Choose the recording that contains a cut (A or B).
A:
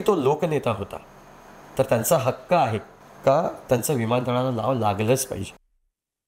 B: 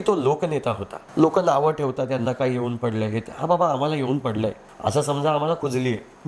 B